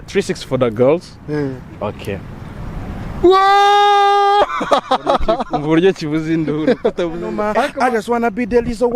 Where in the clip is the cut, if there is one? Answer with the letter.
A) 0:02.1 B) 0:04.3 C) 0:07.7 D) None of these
C